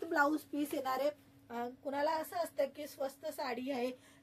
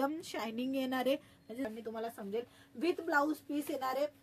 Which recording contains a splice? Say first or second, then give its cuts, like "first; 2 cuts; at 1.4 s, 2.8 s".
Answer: second; 1 cut; at 1.7 s